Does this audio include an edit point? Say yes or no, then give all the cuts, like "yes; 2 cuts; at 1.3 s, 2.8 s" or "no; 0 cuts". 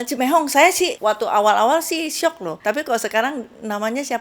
yes; 2 cuts; at 1.0 s, 2.5 s